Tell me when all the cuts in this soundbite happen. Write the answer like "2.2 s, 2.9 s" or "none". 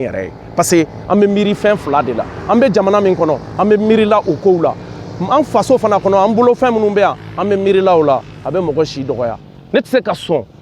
9.4 s